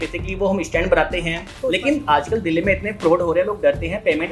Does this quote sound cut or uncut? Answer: cut